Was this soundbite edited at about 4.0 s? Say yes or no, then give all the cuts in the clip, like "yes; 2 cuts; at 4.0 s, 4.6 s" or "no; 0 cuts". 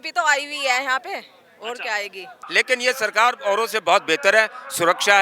no; 1 cut; at 2.4 s